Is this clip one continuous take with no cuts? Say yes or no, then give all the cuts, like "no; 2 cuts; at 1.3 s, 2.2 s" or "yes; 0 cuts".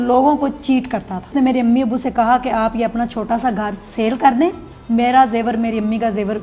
no; 2 cuts; at 1.3 s, 4.7 s